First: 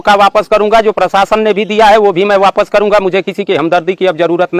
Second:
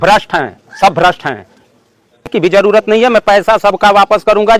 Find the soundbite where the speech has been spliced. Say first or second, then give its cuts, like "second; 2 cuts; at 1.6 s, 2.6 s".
second; 1 cut; at 2.3 s